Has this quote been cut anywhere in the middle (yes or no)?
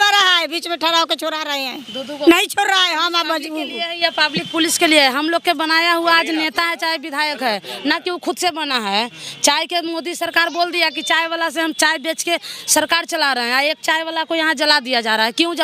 no